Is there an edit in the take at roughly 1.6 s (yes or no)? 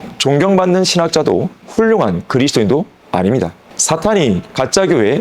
no